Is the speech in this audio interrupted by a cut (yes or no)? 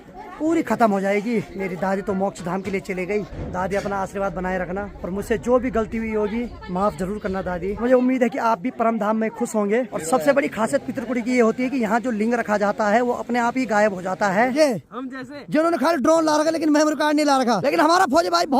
yes